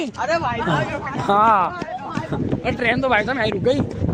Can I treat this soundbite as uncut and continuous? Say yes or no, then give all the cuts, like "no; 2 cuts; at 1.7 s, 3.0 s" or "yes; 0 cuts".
yes; 0 cuts